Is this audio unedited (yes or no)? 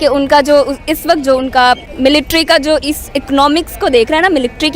no